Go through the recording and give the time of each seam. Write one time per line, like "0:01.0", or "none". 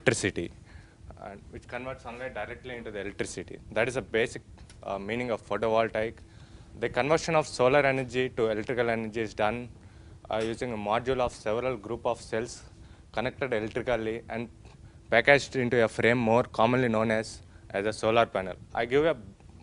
0:16.8